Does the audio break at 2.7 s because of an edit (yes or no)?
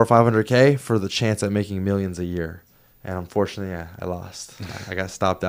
no